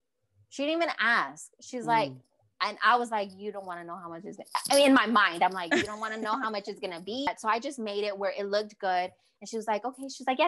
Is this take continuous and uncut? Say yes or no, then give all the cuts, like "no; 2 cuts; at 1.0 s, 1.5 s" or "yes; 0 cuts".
no; 1 cut; at 7.3 s